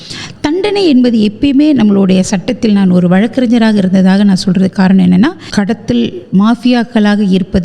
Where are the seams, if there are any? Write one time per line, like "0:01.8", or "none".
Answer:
0:05.4